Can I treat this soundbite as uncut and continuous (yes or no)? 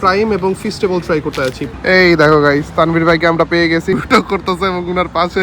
no